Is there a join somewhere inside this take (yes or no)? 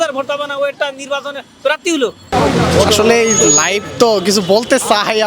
yes